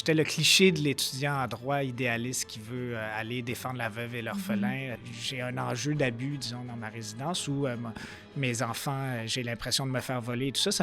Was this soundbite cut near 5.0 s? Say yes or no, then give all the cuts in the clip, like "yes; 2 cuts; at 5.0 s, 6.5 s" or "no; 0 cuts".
yes; 1 cut; at 5.0 s